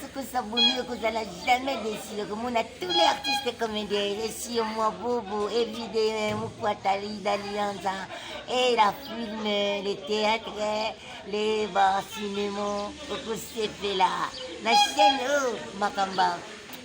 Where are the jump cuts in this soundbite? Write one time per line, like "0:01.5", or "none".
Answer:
0:02.3

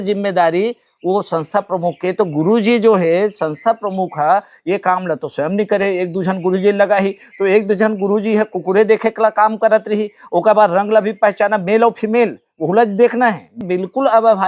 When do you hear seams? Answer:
0:13.6

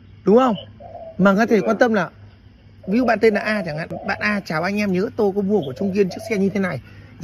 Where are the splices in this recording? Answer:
0:04.0

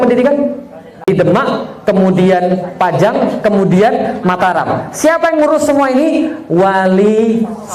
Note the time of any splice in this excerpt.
0:01.1

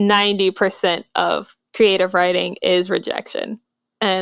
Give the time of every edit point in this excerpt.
0:01.6

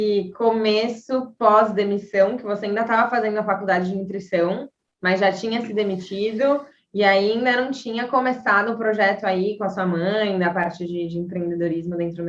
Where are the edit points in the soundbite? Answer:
none

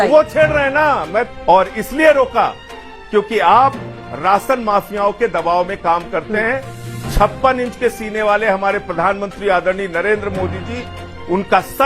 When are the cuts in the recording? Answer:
0:01.3

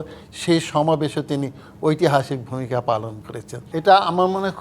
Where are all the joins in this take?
0:03.5

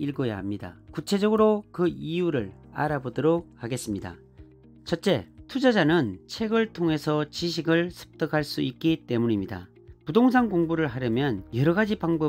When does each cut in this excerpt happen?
none

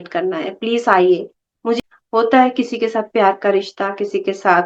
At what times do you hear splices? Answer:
0:01.8

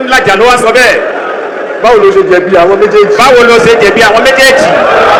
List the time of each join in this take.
none

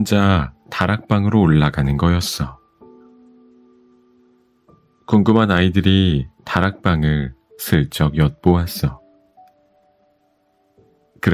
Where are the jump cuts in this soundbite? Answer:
0:02.6
0:04.4

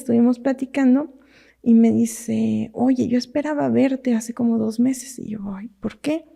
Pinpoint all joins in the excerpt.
none

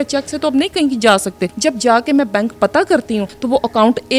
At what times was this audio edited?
0:01.5
0:03.3

